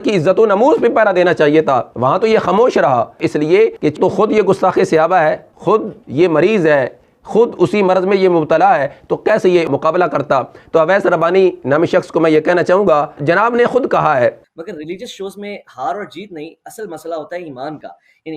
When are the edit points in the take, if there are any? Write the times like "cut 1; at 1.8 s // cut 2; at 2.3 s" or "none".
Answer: cut 1; at 5.5 s // cut 2; at 10.5 s // cut 3; at 14.4 s